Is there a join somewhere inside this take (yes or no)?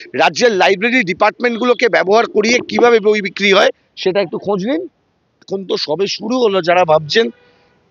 yes